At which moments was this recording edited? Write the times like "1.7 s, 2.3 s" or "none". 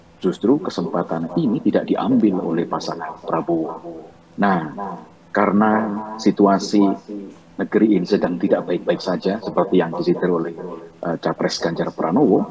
none